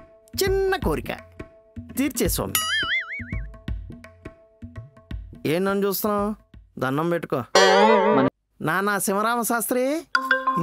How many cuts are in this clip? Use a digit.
1